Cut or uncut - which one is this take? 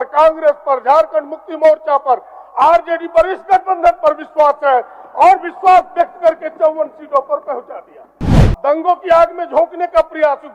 cut